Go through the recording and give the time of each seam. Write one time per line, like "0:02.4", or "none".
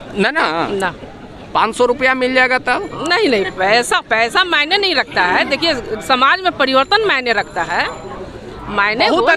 none